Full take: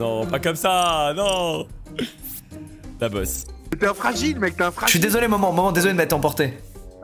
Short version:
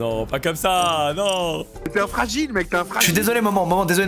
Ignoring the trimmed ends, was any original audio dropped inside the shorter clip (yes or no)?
yes